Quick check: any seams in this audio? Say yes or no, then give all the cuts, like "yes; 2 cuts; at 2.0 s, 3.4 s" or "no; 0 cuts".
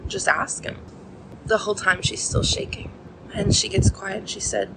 yes; 1 cut; at 0.9 s